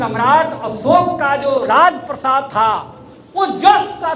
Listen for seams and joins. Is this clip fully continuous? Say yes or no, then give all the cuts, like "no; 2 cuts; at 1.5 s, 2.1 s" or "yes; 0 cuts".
yes; 0 cuts